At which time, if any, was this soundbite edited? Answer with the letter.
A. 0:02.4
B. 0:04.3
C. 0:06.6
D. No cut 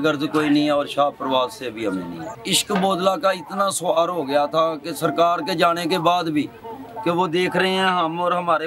A